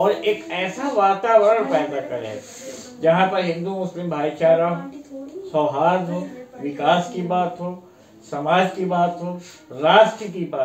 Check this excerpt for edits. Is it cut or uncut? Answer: uncut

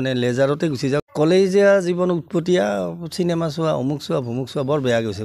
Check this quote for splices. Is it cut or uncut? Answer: cut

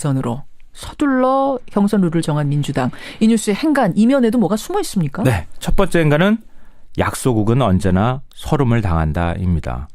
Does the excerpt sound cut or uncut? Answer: cut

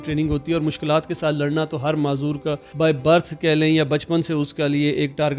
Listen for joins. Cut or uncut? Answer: cut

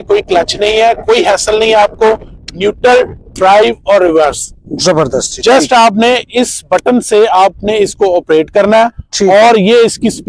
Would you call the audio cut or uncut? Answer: uncut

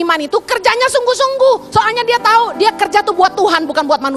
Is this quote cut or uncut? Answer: uncut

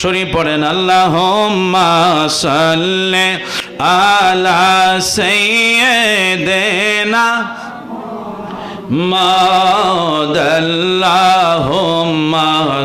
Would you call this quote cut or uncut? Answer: uncut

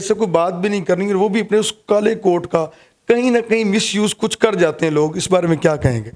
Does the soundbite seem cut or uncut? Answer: uncut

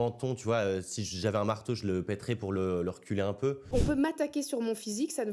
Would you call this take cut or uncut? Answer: cut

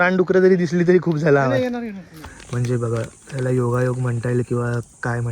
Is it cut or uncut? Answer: cut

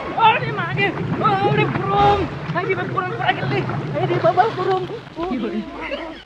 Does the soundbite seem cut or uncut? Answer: cut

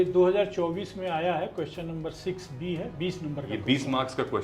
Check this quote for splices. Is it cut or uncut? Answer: uncut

